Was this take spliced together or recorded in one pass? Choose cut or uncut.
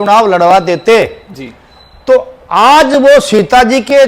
uncut